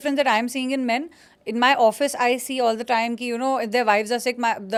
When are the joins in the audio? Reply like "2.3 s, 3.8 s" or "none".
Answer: none

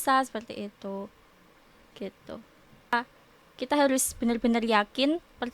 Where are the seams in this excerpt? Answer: 2.9 s

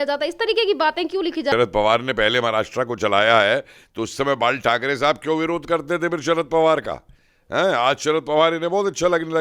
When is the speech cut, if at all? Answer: 1.5 s

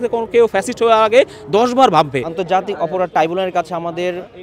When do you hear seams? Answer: 2.3 s

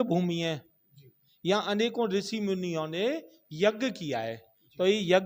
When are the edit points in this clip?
none

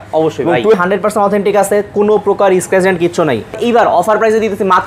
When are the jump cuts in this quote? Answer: 0.7 s, 3.6 s

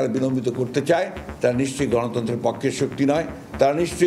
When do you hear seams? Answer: none

